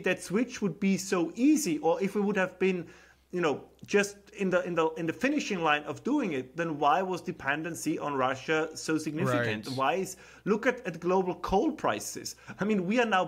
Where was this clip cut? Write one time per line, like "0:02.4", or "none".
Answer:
none